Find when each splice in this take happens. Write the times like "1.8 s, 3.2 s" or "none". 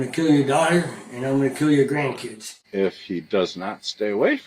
2.5 s